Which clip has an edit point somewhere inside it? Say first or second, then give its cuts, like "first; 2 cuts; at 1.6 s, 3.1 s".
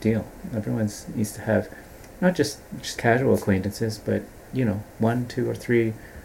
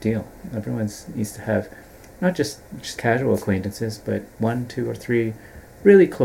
second; 1 cut; at 4.3 s